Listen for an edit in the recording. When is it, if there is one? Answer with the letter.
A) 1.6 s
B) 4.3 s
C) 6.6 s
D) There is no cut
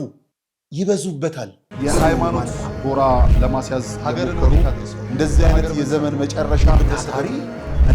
A